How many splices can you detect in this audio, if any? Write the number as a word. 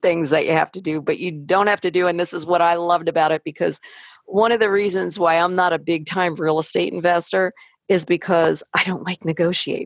zero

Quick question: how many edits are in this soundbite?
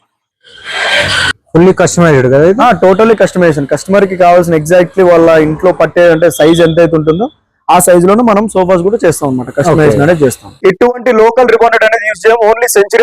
one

